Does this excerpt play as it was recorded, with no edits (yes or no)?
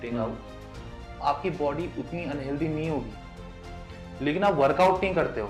yes